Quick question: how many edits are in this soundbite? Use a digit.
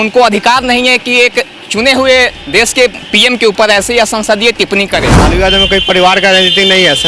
1